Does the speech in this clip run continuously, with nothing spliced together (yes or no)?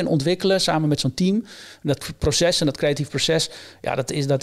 yes